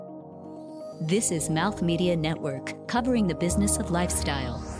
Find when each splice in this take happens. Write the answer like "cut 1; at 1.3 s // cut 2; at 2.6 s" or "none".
none